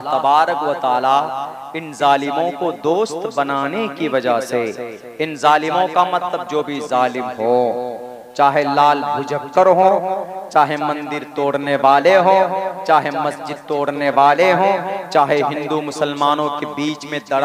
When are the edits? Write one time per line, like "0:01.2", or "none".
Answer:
none